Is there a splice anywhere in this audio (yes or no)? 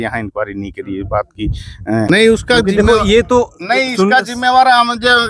yes